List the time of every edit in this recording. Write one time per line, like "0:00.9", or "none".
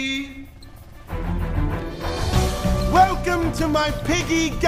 none

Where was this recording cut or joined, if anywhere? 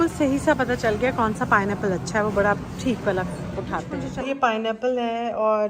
0:04.2

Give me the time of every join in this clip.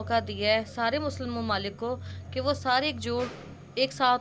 none

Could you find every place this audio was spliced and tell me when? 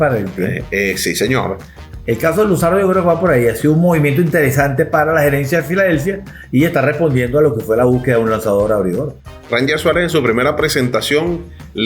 0:01.8
0:09.2

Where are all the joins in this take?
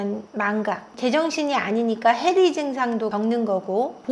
0:03.1

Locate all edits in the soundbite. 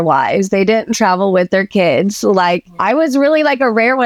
0:02.7

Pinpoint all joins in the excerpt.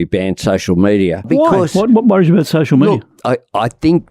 0:01.3

